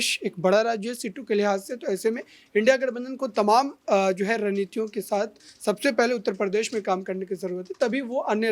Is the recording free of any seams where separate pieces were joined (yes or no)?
yes